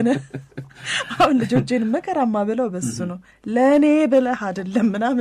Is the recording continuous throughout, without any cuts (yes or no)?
yes